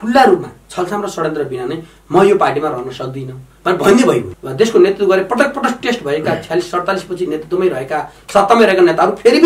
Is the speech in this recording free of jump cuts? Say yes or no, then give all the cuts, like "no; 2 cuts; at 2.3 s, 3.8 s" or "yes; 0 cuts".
no; 1 cut; at 4.3 s